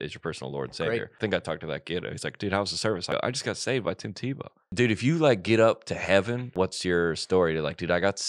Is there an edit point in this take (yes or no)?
yes